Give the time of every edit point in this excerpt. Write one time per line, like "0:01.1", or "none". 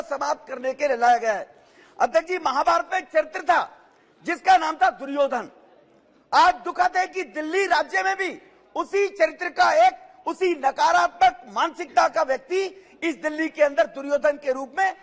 none